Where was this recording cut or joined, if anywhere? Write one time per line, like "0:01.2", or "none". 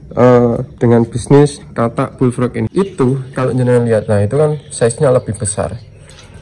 0:02.7